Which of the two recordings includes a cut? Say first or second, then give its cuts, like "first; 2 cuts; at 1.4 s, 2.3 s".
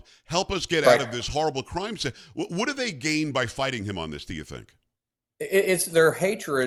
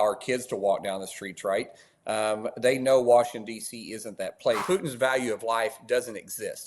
second; 1 cut; at 4.6 s